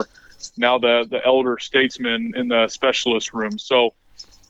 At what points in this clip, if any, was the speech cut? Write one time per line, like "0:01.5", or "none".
none

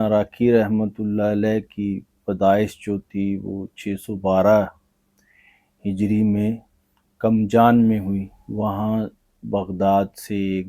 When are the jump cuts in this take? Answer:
0:08.4

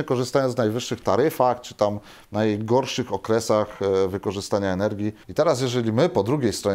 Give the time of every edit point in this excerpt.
0:05.2

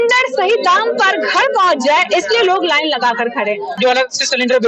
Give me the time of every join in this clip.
0:03.7

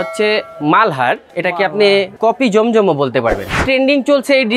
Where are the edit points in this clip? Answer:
0:01.3
0:02.1
0:03.6

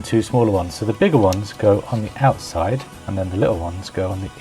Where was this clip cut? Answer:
0:03.0

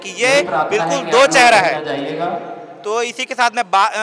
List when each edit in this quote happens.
none

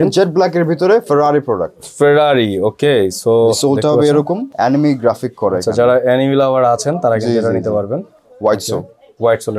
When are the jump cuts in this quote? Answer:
0:04.5

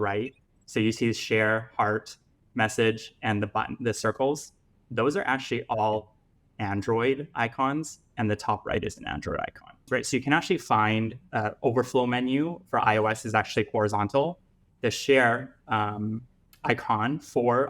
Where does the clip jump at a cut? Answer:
0:09.7

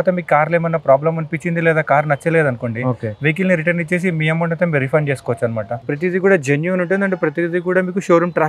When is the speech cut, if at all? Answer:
0:05.9

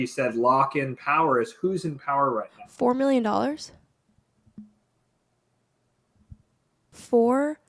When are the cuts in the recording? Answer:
0:02.6

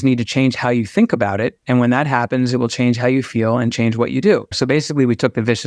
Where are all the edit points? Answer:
0:04.5

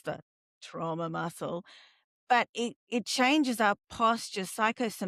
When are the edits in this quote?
none

